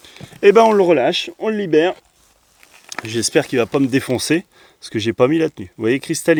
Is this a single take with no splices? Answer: yes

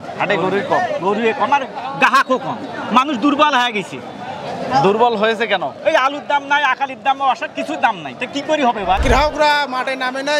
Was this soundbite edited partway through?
yes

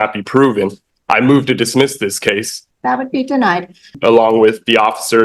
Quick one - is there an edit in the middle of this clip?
yes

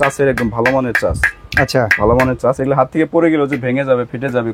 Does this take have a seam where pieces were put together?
no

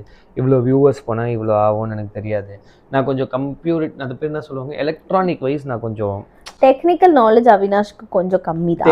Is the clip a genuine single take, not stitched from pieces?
yes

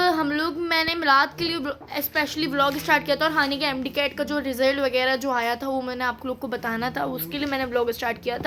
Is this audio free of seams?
yes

